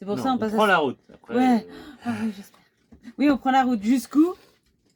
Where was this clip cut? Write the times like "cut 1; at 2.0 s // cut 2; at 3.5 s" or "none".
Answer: none